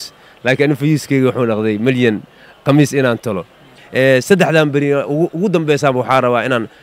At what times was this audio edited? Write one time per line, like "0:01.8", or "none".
0:03.4